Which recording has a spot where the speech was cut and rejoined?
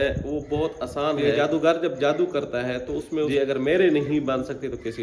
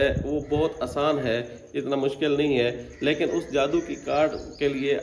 first; 2 cuts; at 1.2 s, 3.3 s

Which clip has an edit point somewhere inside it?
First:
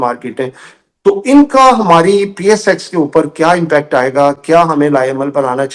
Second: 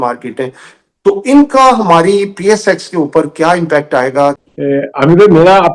second; 1 cut; at 4.4 s

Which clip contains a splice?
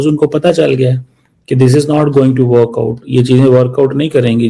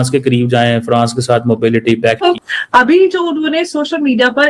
second; 1 cut; at 2.2 s

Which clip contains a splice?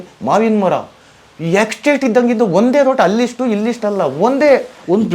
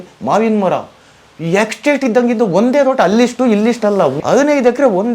second; 1 cut; at 4.2 s

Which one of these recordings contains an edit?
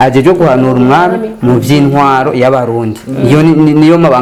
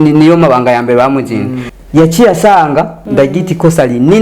second; 2 cuts; at 1.6 s, 3.0 s

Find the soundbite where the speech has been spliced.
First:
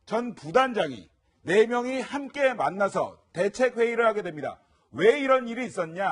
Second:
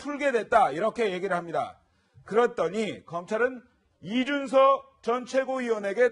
second; 1 cut; at 1.2 s

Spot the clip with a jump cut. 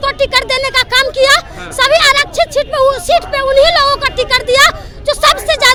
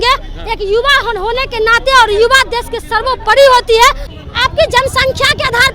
second; 1 cut; at 4.1 s

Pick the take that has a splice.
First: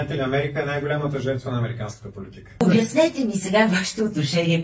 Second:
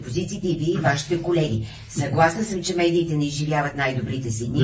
first; 1 cut; at 2.6 s

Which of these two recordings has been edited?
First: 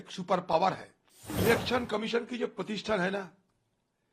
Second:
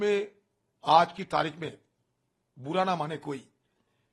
first; 1 cut; at 1.3 s

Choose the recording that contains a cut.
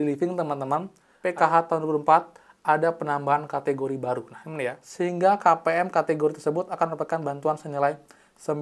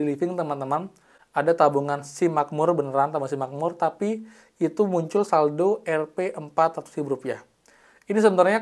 first; 2 cuts; at 1.1 s, 4.8 s

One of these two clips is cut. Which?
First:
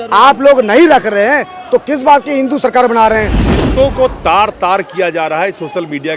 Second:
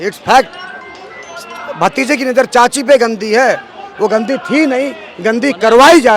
first; 1 cut; at 3.4 s

